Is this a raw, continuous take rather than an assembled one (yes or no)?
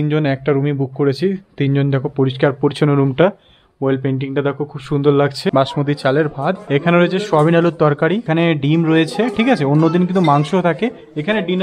no